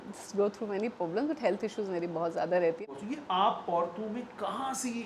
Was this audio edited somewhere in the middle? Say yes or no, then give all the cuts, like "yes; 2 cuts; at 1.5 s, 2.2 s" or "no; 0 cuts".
yes; 1 cut; at 2.8 s